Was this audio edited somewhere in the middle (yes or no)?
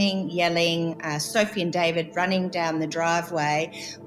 no